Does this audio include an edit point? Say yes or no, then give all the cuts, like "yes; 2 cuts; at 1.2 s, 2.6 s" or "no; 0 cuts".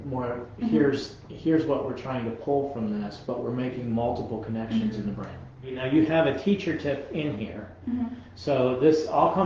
yes; 1 cut; at 5.8 s